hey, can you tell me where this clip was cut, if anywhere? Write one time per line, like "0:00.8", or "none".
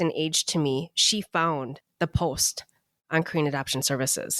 0:01.8